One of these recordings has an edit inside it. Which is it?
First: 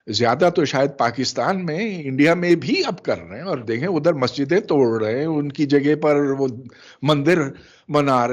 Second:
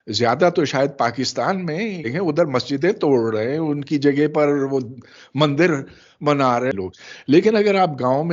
second; 2 cuts; at 2.0 s, 6.7 s

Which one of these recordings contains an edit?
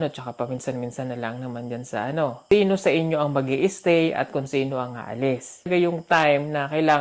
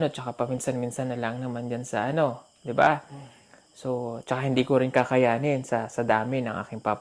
first; 2 cuts; at 2.4 s, 5.7 s

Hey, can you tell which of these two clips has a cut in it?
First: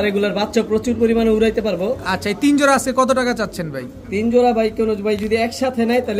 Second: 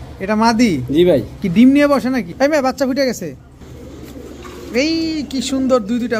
second; 2 cuts; at 2.3 s, 3.5 s

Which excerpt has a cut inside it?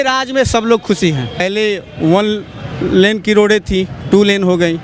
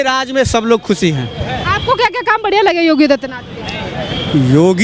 first; 1 cut; at 1.4 s

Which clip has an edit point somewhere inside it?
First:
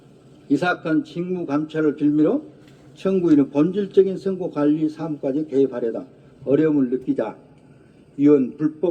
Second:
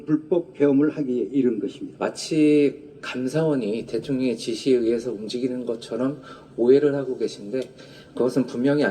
second; 1 cut; at 1.8 s

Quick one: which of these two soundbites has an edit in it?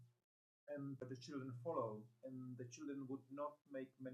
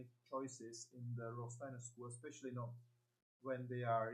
first; 1 cut; at 1.0 s

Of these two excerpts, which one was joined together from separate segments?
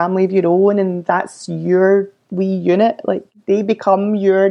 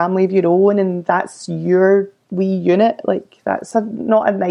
first; 1 cut; at 3.3 s

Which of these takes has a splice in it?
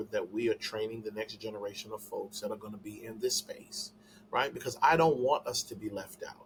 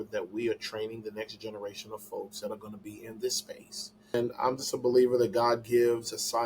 second; 1 cut; at 4.1 s

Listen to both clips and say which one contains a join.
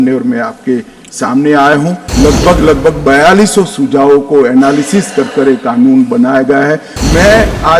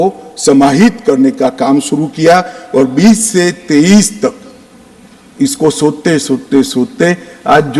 first; 2 cuts; at 2.0 s, 6.9 s

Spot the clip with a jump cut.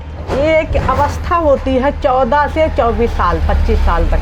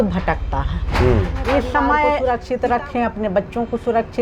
second; 1 cut; at 2.2 s

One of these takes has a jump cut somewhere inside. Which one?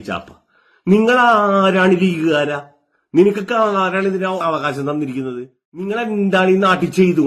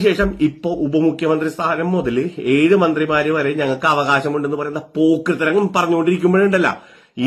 first; 1 cut; at 5.8 s

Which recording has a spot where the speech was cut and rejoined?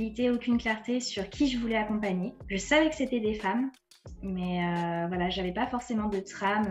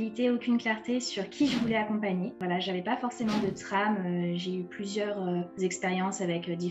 second; 2 cuts; at 2.4 s, 5.5 s

